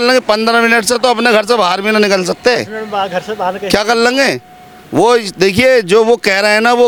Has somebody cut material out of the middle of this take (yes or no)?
no